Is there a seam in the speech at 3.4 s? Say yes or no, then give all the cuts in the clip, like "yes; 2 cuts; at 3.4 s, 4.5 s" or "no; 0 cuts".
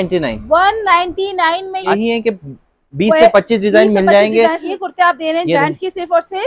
no; 1 cut; at 4.7 s